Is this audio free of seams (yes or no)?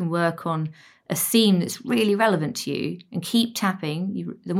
yes